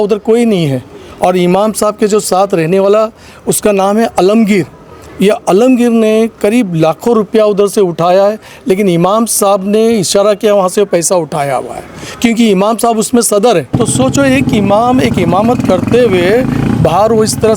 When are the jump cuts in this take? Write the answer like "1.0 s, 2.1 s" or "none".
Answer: 13.7 s

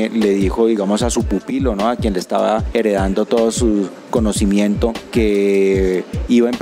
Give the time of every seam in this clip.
2.7 s, 5.0 s

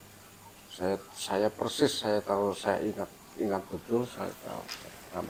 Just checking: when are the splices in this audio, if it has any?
none

